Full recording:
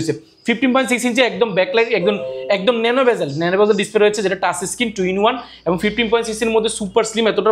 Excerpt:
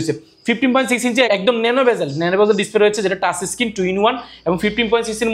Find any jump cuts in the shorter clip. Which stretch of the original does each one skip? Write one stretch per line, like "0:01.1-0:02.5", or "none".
0:01.3-0:02.5